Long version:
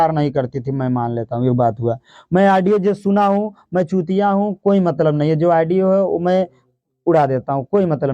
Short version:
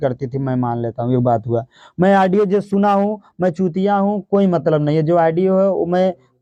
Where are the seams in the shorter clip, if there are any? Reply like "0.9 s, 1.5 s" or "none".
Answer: none